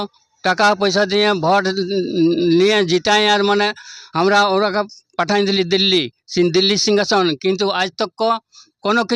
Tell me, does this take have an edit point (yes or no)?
no